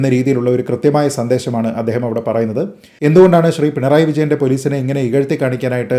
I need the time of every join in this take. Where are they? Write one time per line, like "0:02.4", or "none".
0:02.8

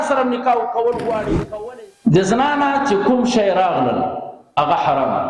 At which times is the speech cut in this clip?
0:01.4

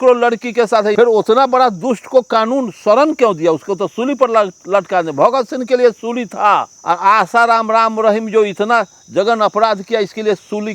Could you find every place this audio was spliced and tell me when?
0:00.9
0:06.7

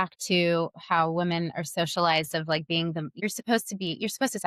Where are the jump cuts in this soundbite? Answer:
0:03.1

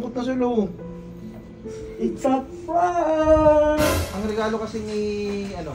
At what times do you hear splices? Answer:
0:04.1

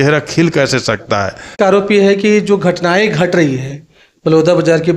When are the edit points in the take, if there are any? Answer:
0:01.5

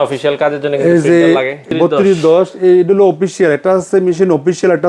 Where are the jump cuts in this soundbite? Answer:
0:01.7

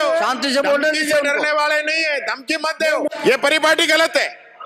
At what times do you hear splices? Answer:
0:03.1

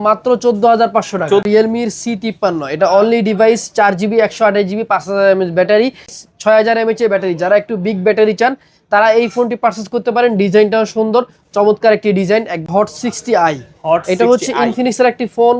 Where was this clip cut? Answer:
0:01.5
0:06.2
0:12.7

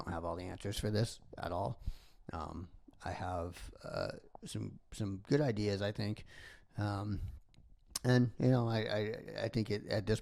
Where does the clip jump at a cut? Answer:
none

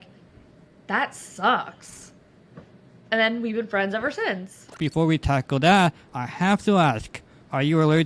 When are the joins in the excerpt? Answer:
0:04.6

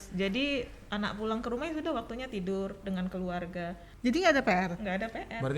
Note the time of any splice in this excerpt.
0:03.8

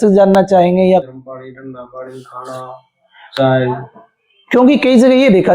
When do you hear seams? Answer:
0:01.0

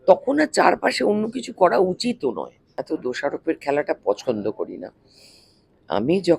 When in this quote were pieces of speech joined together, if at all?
0:02.7

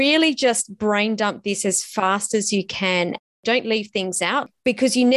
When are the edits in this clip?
0:03.3
0:04.4

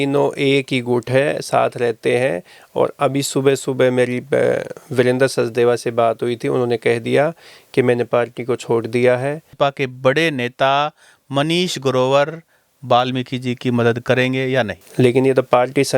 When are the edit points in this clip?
0:09.5
0:14.8

